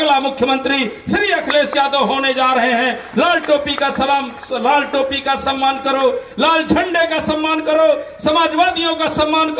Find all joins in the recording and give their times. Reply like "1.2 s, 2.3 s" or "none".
none